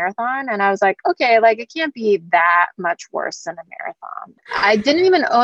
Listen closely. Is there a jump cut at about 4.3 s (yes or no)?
yes